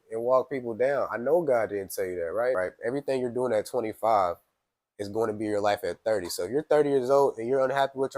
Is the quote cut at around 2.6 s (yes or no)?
yes